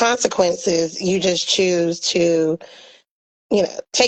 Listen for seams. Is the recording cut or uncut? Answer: uncut